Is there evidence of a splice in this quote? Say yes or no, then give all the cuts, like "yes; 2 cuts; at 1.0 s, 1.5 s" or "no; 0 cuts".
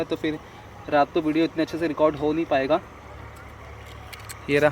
no; 0 cuts